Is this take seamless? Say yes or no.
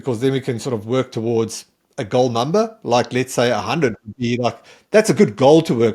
yes